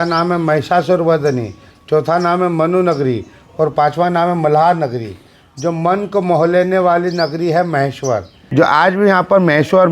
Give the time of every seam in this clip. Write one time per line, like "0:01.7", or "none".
0:08.4